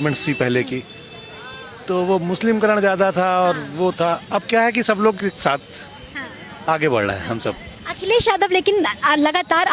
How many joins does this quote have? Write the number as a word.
zero